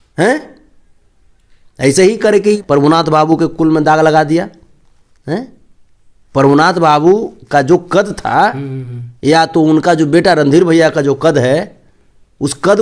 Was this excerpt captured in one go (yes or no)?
yes